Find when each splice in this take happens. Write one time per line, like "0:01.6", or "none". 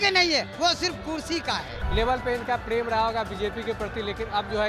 0:01.8